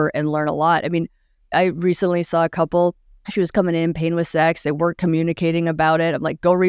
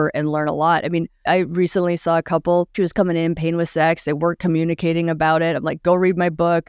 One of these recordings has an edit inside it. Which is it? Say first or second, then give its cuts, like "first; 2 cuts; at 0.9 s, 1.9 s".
second; 2 cuts; at 1.1 s, 2.7 s